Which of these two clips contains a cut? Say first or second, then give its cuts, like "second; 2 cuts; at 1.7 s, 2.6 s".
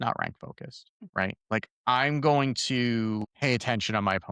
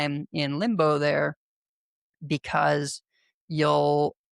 first; 2 cuts; at 0.9 s, 3.2 s